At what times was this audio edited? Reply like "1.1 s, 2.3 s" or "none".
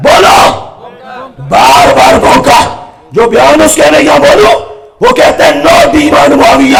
none